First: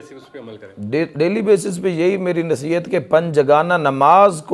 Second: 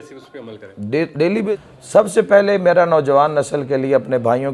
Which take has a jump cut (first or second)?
second